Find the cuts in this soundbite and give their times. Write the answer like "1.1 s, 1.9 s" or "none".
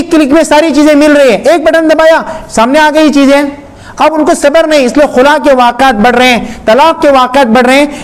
none